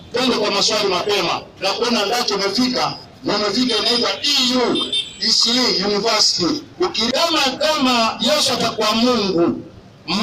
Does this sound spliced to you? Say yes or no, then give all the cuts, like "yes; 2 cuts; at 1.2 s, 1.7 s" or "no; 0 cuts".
yes; 1 cut; at 7.1 s